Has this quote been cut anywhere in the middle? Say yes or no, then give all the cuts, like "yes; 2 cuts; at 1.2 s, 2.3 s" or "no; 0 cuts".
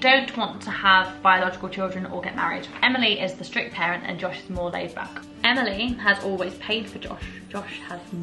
yes; 2 cuts; at 2.7 s, 5.2 s